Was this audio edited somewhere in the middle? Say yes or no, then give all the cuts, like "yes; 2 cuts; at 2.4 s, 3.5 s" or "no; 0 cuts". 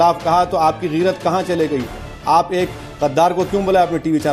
no; 0 cuts